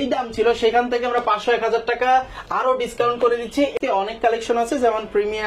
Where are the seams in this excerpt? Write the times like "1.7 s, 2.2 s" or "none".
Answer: 3.7 s